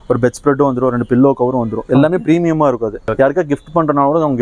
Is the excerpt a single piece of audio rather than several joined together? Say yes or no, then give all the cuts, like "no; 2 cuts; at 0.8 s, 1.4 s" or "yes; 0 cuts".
no; 1 cut; at 3.1 s